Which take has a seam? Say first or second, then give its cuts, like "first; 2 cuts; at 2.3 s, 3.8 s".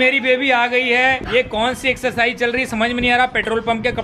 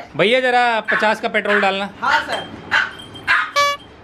second; 1 cut; at 1.9 s